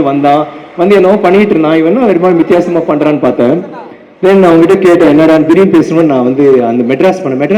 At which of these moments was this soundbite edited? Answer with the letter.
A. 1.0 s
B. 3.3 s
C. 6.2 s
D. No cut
D